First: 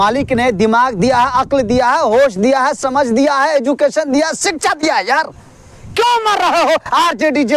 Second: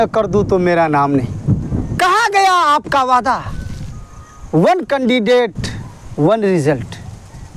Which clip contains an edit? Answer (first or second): second